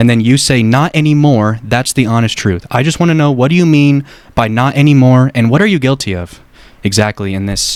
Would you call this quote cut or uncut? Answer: uncut